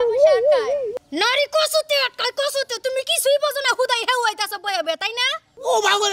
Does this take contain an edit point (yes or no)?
yes